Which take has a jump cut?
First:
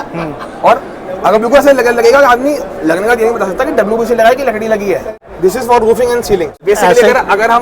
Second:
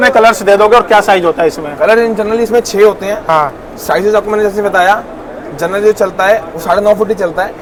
first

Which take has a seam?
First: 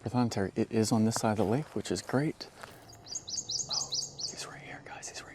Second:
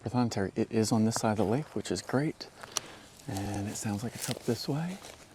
first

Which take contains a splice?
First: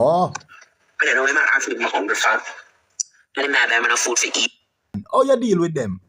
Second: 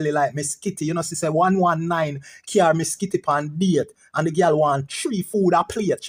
first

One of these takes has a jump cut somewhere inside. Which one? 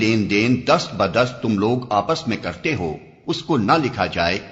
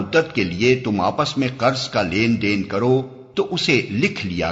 second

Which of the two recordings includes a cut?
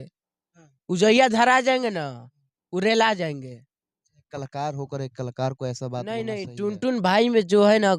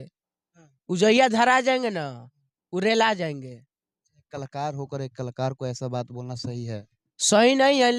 first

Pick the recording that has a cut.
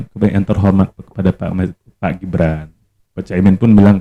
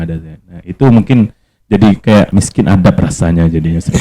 second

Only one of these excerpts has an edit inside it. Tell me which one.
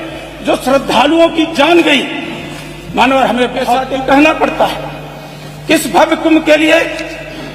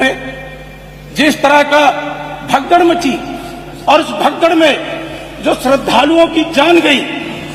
first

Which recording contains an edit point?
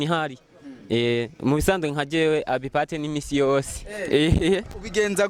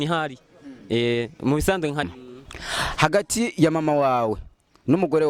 second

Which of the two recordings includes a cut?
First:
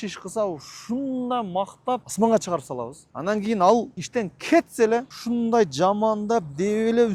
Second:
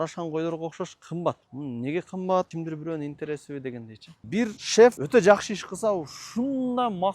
second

